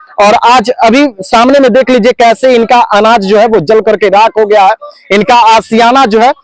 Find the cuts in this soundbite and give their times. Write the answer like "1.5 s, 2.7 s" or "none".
none